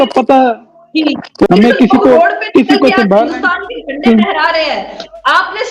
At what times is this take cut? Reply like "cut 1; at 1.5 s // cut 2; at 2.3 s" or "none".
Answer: cut 1; at 1.5 s